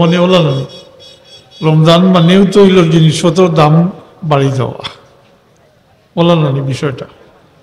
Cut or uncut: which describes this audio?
uncut